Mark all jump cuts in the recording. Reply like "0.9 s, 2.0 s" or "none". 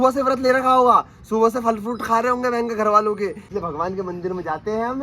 3.4 s